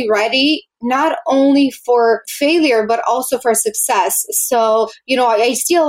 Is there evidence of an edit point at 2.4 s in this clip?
no; 0 cuts

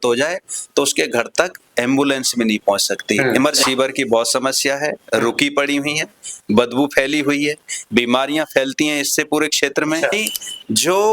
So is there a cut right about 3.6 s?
yes; 2 cuts; at 3.6 s, 10.2 s

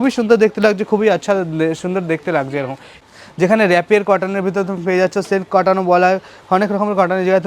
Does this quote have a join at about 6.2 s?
no; 1 cut; at 2.8 s

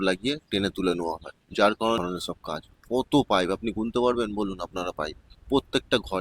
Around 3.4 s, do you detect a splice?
no; 1 cut; at 2.0 s

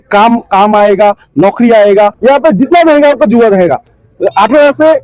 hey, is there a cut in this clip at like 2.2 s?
yes; 1 cut; at 2.2 s

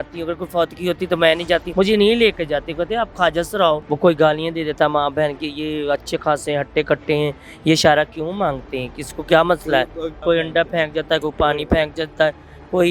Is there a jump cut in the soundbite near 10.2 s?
yes; 3 cuts; at 1.7 s, 3.8 s, 10.2 s

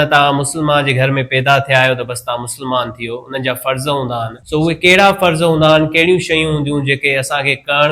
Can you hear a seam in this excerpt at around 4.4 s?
yes; 1 cut; at 4.4 s

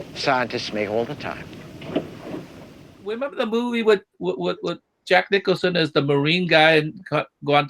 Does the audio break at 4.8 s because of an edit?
no; 1 cut; at 3.2 s

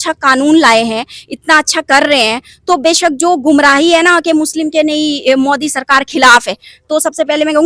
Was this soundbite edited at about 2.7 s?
no; 0 cuts

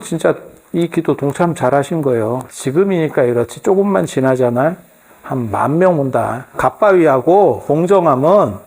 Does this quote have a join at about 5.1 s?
no; 3 cuts; at 2.5 s, 6.5 s, 7.6 s

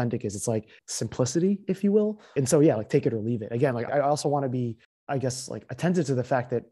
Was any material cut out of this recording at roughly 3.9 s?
yes; 2 cuts; at 2.2 s, 3.9 s

